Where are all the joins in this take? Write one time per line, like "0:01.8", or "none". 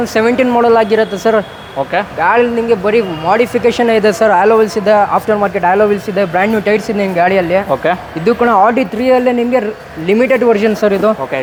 none